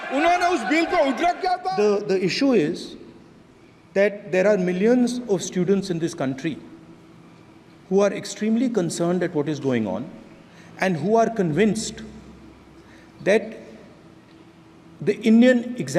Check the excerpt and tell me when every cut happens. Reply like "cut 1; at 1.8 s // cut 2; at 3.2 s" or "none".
cut 1; at 1.6 s